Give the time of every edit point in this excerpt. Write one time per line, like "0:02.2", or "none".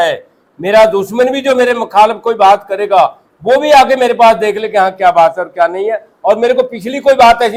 none